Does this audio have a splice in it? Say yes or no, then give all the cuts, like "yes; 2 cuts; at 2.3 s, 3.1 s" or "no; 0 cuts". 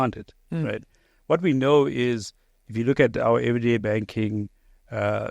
no; 0 cuts